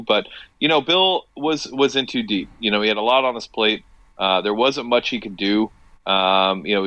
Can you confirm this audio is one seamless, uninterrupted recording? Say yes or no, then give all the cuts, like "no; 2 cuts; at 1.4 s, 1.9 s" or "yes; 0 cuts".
yes; 0 cuts